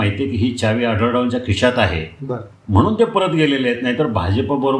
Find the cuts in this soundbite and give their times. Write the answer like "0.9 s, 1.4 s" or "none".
none